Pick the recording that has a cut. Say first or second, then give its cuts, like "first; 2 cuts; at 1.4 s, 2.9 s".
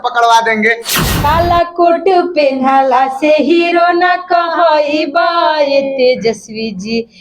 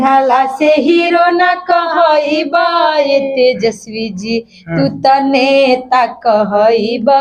first; 1 cut; at 1.1 s